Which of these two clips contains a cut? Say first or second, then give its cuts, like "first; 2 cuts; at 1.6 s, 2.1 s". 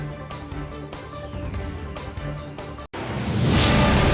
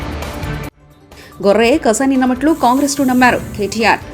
first; 1 cut; at 2.8 s